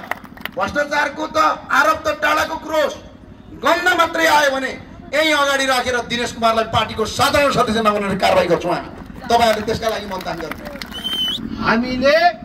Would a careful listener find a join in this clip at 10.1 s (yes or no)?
no